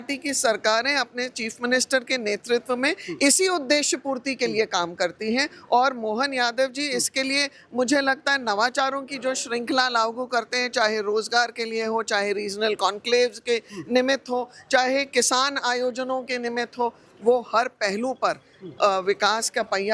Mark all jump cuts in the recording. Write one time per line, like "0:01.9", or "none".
none